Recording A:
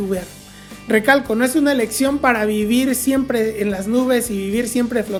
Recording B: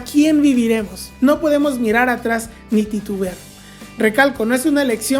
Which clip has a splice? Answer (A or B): B